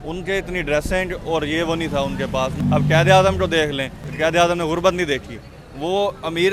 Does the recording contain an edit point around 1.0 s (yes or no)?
no